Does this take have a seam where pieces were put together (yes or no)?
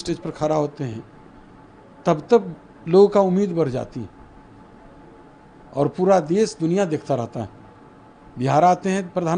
no